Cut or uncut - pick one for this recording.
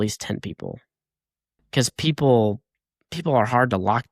uncut